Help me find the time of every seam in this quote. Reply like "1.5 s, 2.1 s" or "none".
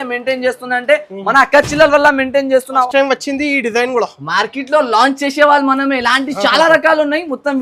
2.8 s